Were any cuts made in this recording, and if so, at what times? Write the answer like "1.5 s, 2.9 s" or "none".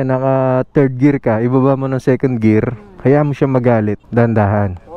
4.0 s

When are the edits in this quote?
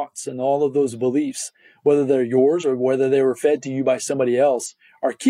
none

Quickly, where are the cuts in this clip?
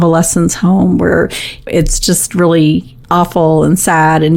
1.7 s, 2.9 s

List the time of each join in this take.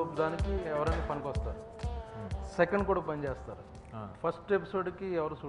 none

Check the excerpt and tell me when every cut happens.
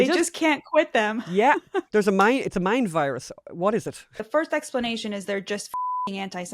1.9 s, 4.2 s

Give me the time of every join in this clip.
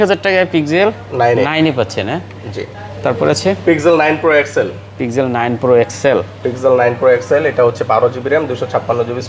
none

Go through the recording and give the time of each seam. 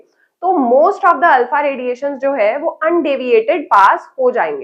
none

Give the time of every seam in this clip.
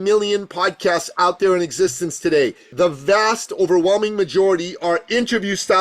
2.7 s

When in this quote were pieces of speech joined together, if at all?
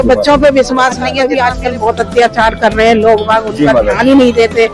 1.1 s

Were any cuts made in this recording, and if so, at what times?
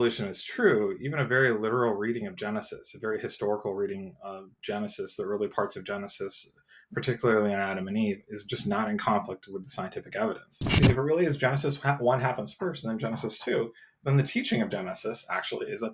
10.8 s

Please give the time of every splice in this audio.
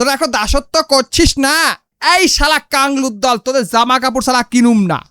1.9 s

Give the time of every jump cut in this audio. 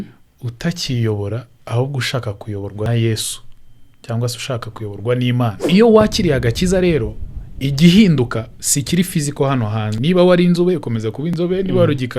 2.9 s, 5.6 s, 9.9 s

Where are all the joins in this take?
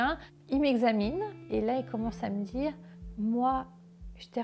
1.4 s

